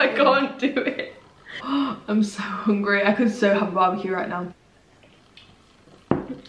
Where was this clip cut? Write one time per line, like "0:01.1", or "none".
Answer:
0:01.6
0:04.5

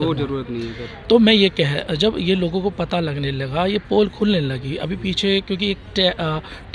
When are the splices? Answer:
none

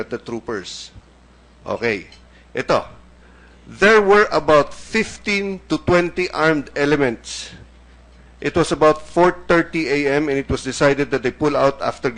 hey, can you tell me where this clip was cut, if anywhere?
0:05.1

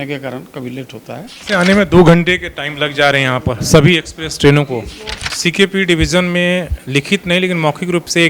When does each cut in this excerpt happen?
0:01.3
0:05.2

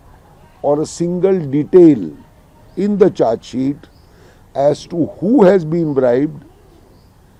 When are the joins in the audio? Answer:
none

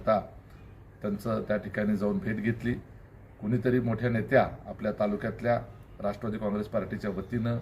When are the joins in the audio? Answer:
0:04.6

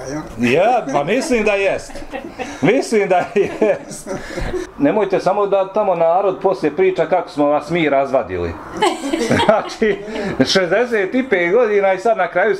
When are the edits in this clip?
0:04.7

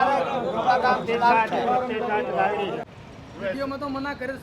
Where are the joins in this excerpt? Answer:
0:02.8

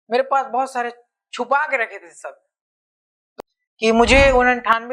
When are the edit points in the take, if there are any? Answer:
0:03.2

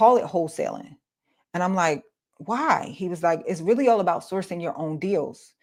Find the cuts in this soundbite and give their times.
none

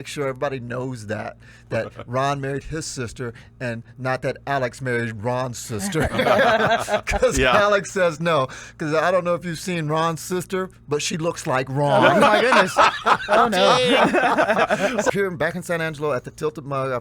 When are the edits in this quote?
0:15.1

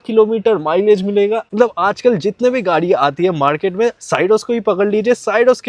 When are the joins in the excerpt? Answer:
0:01.5

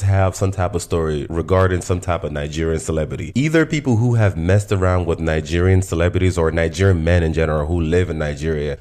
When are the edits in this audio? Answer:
none

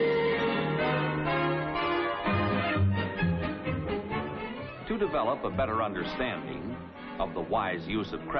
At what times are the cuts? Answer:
none

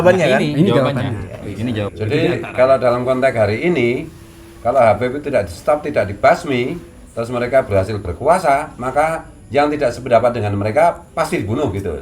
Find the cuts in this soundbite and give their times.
0:01.9

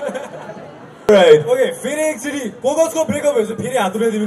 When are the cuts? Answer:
0:01.1

